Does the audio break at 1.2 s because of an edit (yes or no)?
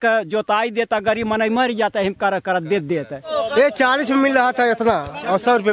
no